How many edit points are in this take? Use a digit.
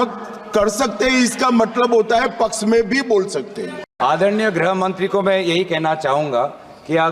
1